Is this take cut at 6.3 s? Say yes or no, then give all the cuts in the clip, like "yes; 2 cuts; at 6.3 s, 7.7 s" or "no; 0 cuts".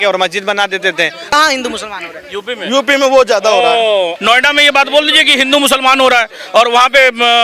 no; 2 cuts; at 1.2 s, 4.1 s